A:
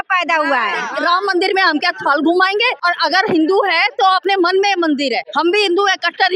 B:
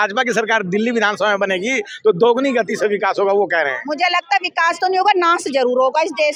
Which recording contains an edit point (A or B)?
A